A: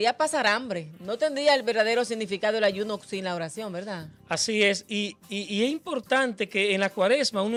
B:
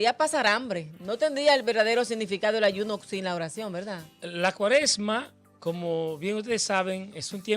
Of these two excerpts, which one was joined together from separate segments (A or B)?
B